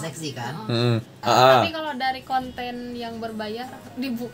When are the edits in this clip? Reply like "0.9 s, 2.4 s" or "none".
1.2 s